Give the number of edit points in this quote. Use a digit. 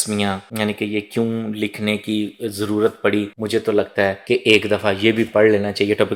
0